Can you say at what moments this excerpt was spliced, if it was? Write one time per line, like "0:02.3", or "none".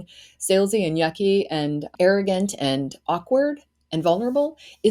0:01.9